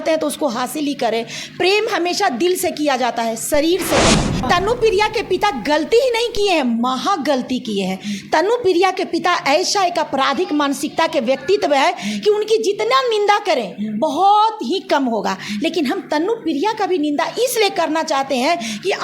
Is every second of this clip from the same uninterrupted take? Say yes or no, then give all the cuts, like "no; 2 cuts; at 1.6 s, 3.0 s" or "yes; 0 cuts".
no; 1 cut; at 4.4 s